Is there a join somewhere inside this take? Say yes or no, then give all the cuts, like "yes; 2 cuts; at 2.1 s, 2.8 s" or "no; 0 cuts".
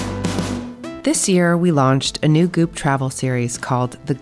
yes; 1 cut; at 1.0 s